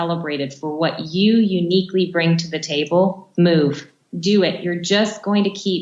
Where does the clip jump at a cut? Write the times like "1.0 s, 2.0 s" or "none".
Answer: 3.2 s, 4.0 s